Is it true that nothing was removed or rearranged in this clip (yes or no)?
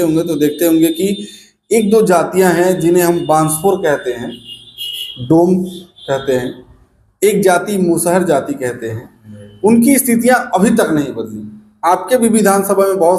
yes